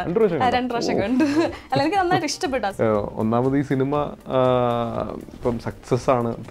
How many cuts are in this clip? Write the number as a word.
one